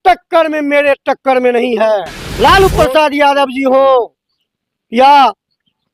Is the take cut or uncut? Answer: cut